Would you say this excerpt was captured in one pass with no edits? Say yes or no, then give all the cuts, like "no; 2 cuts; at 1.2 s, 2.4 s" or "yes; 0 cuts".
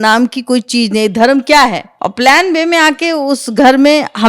no; 1 cut; at 1.9 s